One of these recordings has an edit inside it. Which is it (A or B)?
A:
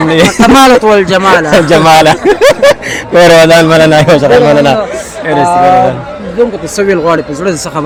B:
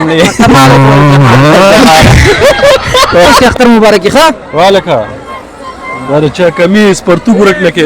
B